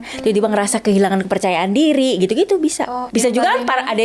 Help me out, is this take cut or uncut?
cut